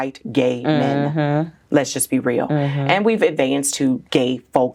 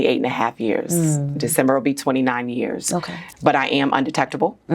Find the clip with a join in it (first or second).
second